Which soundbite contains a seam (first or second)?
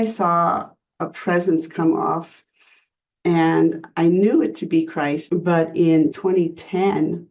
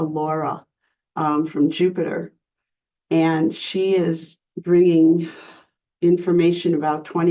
first